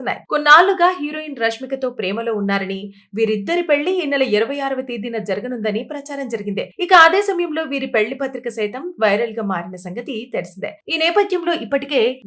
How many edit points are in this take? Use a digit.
0